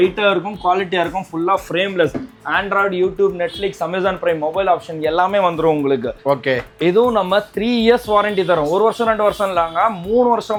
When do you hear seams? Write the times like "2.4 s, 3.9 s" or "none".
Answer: none

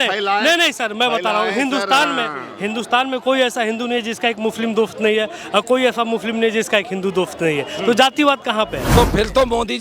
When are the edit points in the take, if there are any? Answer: 8.8 s

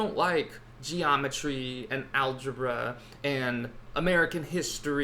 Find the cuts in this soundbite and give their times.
3.8 s

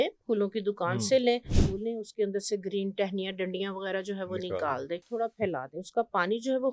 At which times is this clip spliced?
1.6 s, 5.1 s

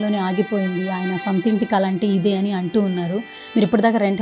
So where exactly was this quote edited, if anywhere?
none

